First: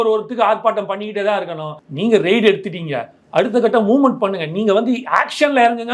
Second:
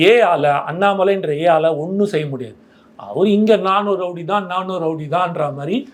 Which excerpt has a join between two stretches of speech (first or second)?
first